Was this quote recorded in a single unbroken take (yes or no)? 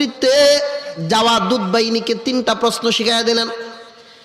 yes